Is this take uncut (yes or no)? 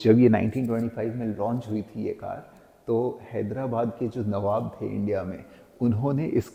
yes